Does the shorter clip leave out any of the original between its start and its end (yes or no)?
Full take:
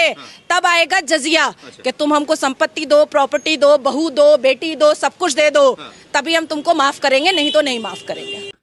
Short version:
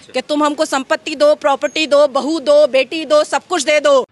no